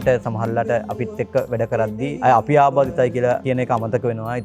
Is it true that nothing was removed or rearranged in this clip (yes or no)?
no